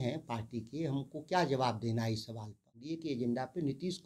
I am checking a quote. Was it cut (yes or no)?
yes